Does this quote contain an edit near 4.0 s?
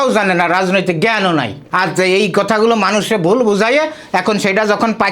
no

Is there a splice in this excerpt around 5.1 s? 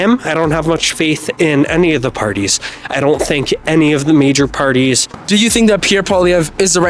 yes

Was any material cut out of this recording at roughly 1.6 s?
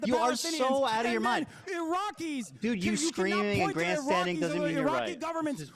no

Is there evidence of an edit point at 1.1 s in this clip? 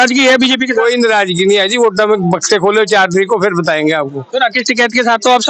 no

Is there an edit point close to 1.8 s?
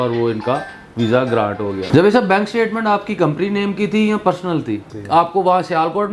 yes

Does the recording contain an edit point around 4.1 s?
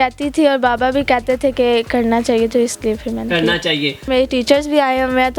yes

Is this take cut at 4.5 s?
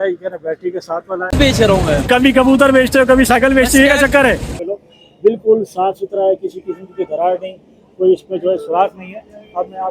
yes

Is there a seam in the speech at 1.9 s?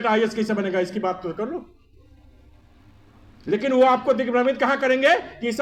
no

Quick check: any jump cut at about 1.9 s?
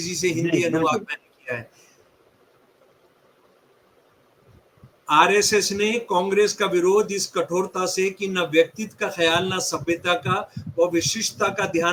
no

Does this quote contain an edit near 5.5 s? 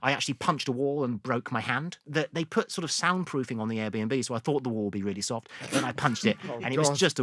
no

